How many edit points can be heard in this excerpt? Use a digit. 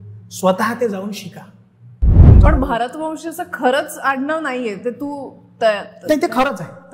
1